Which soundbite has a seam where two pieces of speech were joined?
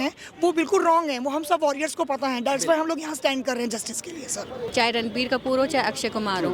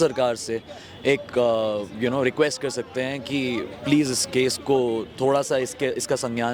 first; 1 cut; at 4.7 s

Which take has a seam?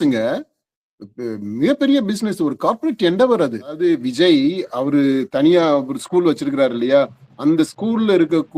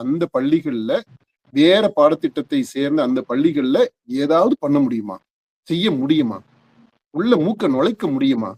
first; 1 cut; at 3.8 s

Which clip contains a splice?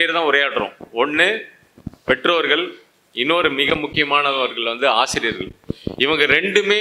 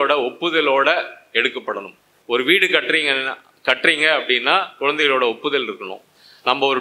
second; 1 cut; at 2.1 s

